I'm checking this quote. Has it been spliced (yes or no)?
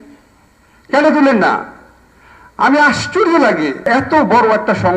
yes